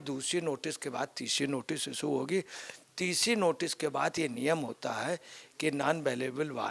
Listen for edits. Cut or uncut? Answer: uncut